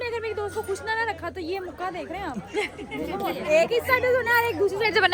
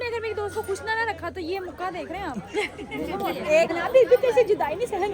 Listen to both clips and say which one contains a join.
second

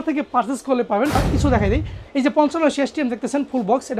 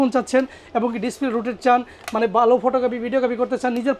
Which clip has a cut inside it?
first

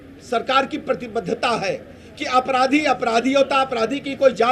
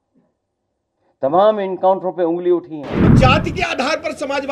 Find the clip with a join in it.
second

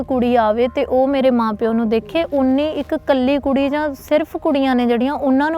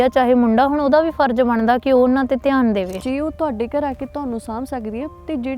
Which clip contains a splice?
second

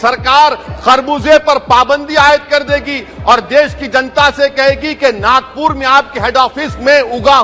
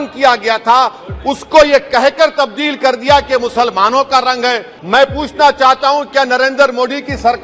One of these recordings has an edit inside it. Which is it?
second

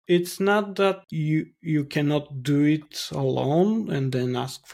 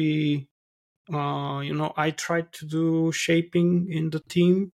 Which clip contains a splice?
first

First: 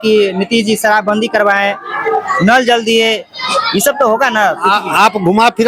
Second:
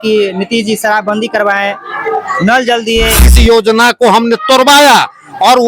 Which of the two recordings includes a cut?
second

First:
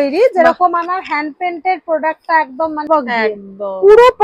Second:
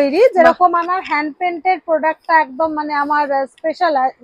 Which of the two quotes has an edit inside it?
first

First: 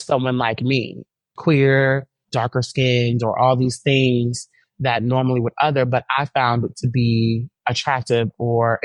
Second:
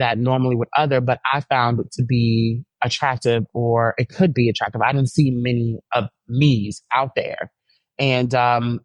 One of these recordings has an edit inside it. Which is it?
first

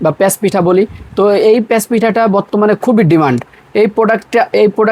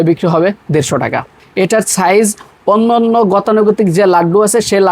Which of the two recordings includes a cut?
second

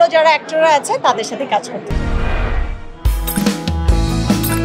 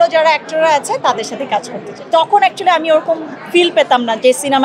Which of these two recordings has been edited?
second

